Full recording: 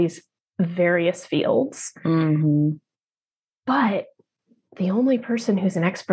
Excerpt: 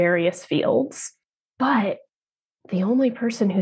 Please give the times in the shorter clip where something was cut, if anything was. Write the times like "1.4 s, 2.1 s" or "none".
1.0 s